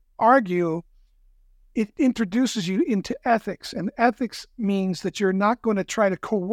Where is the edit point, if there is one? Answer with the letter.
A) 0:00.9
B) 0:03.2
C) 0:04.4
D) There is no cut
D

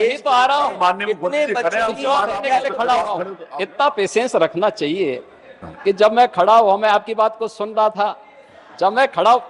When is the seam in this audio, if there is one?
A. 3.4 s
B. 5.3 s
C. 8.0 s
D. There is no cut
A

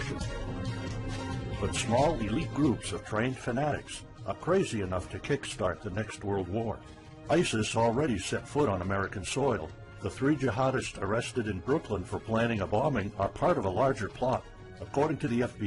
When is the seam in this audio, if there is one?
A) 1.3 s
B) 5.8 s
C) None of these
C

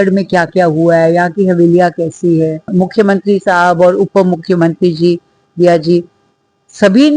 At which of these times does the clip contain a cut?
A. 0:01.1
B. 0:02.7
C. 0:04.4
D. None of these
B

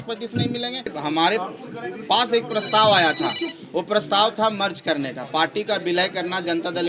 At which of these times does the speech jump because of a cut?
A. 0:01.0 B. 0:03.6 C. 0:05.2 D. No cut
A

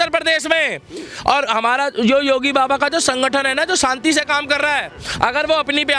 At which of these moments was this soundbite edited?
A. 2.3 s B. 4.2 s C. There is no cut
C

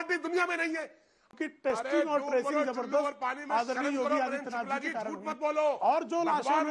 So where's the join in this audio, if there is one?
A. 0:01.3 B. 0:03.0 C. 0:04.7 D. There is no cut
A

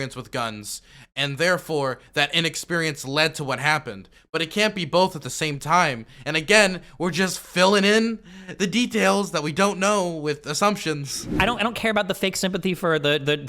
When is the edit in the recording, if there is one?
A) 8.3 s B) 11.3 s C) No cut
B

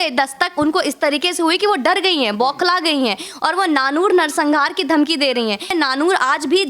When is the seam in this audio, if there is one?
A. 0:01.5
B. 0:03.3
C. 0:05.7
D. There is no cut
C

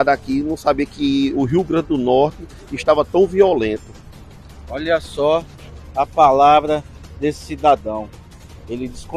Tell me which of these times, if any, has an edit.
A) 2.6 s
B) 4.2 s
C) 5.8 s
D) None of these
D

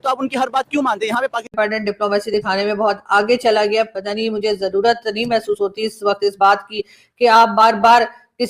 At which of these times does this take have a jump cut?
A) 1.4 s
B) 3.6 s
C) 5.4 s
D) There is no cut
A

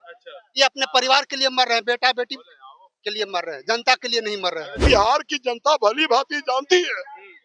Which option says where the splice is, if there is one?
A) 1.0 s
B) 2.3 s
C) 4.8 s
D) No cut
C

